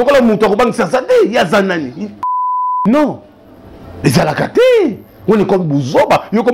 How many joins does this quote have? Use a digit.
1